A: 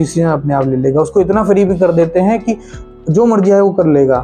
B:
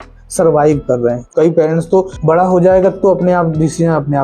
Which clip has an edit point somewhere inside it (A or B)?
B